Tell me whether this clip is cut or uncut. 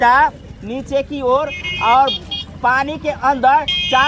uncut